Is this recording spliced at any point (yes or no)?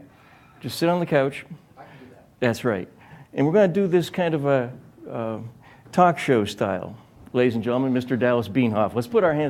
yes